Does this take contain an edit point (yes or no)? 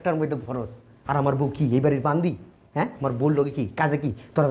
no